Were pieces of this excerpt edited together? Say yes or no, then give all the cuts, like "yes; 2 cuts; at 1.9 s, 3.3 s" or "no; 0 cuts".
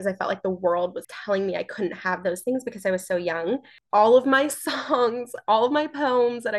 yes; 2 cuts; at 1.1 s, 3.7 s